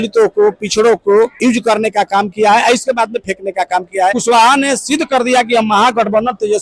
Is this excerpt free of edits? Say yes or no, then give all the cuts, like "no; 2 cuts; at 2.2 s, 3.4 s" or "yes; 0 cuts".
no; 2 cuts; at 1.3 s, 4.2 s